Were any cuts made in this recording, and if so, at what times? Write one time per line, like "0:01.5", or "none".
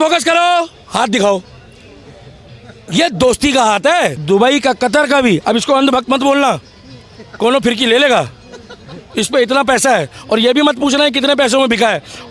0:04.2